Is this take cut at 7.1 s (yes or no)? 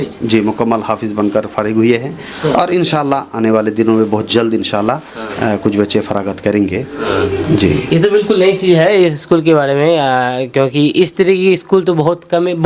no